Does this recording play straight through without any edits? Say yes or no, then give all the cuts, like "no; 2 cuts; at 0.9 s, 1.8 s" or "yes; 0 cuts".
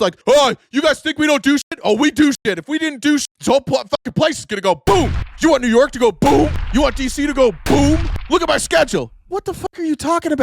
no; 1 cut; at 3.2 s